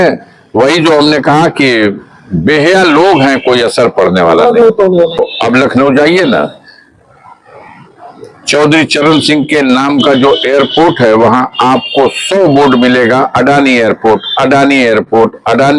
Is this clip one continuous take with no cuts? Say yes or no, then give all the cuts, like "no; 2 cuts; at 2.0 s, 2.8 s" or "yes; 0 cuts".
no; 1 cut; at 5.2 s